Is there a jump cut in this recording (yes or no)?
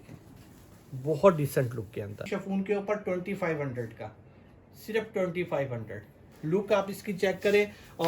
yes